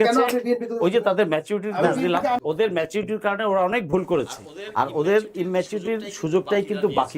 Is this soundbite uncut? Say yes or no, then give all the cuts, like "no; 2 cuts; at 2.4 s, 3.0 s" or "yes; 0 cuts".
no; 1 cut; at 2.4 s